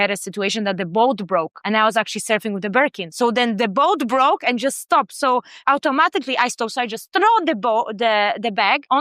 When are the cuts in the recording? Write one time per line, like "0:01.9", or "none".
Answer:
none